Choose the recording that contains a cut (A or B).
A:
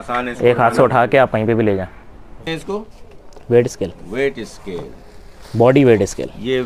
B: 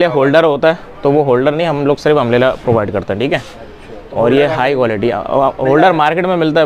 A